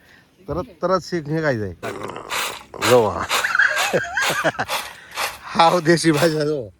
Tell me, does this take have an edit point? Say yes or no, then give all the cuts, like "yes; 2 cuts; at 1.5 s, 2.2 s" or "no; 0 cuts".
yes; 1 cut; at 1.9 s